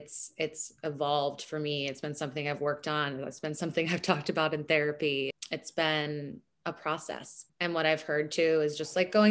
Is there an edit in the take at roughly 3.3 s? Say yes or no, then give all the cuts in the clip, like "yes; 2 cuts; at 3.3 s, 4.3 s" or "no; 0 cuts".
no; 2 cuts; at 5.4 s, 7.4 s